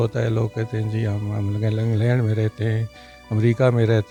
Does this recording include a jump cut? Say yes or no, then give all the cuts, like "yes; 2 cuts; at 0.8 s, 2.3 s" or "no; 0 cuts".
no; 0 cuts